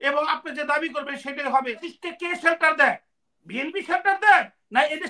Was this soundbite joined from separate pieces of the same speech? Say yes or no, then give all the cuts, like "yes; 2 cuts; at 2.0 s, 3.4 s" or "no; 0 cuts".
yes; 1 cut; at 1.9 s